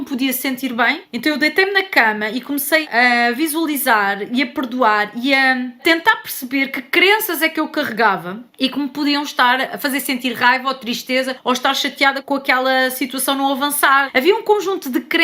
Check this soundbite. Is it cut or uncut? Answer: cut